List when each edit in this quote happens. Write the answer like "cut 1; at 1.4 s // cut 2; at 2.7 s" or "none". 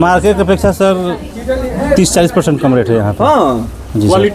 none